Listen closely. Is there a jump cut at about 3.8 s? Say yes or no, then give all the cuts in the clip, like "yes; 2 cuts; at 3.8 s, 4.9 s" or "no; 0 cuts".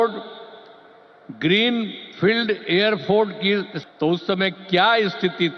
yes; 1 cut; at 3.8 s